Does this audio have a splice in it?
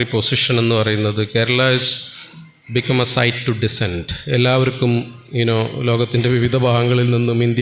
no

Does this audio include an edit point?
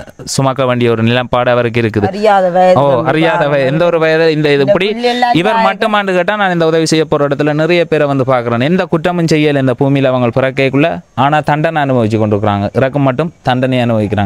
no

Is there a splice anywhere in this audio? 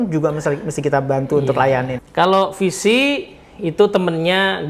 yes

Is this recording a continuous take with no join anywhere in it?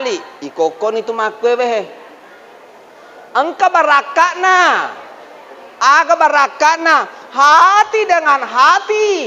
yes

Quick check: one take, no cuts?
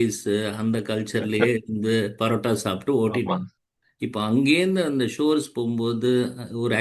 yes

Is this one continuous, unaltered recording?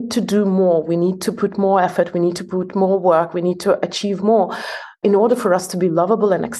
no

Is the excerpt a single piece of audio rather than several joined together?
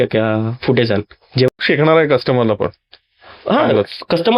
no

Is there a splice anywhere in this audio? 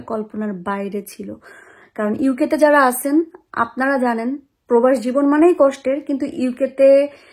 no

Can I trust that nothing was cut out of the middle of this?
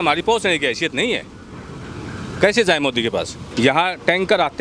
no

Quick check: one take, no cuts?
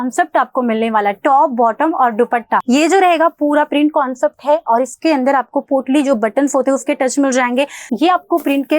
no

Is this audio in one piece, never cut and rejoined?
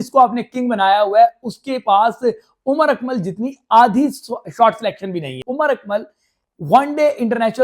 no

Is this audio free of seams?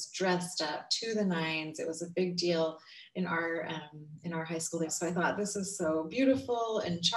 no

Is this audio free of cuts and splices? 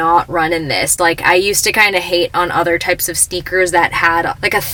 yes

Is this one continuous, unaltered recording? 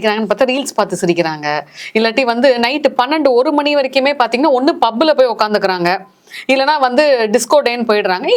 yes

